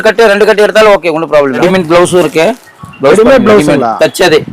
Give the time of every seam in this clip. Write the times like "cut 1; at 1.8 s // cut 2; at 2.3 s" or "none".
cut 1; at 1.6 s